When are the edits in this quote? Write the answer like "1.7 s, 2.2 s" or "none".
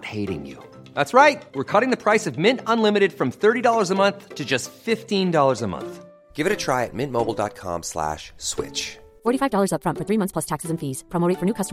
none